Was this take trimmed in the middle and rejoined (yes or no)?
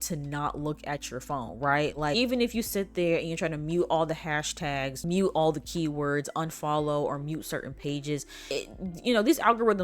no